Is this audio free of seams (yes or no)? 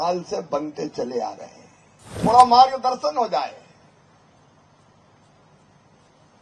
no